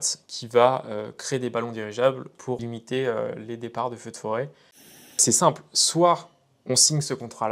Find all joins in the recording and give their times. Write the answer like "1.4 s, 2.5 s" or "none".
2.6 s, 5.2 s